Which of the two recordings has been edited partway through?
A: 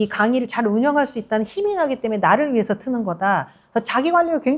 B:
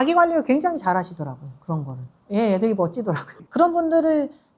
B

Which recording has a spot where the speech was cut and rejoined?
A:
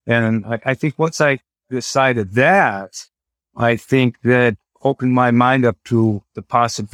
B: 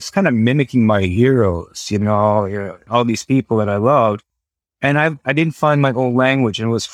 B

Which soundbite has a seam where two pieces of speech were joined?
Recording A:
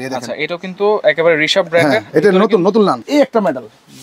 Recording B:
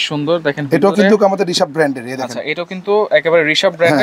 A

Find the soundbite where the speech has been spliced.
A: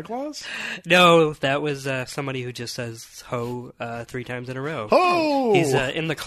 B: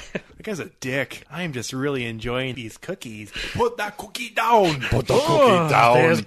B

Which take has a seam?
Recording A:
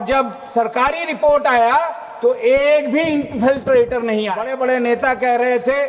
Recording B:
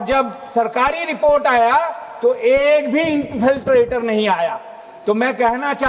A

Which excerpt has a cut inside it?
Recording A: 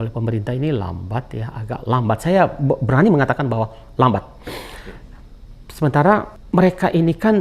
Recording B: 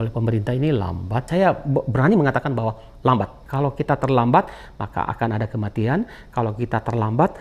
B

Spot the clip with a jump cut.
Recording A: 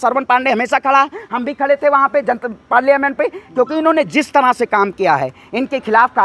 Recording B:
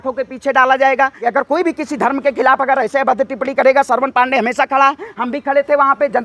B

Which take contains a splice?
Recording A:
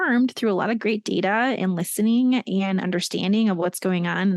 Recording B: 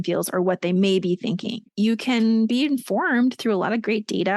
B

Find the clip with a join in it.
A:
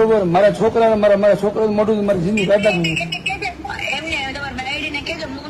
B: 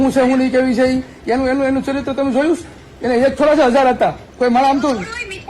B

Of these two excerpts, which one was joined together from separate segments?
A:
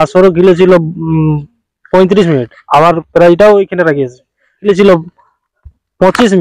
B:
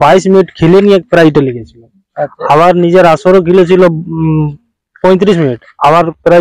A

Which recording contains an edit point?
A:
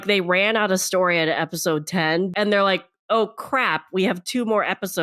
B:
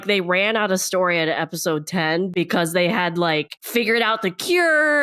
A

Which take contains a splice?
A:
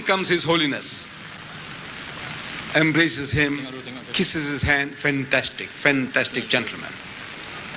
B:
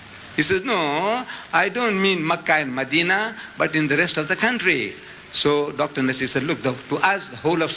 A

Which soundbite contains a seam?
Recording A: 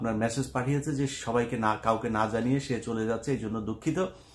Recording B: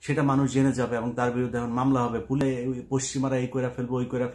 B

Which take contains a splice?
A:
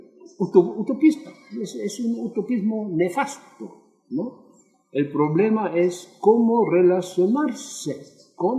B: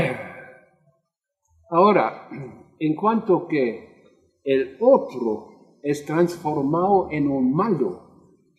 B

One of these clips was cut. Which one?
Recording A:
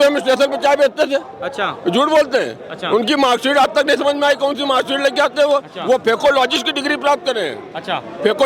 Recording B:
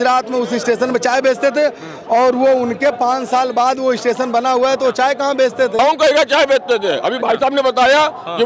B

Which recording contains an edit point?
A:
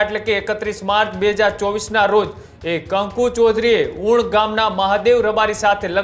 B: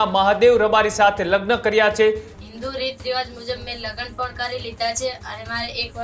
B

